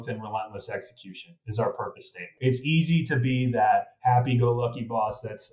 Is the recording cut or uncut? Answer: cut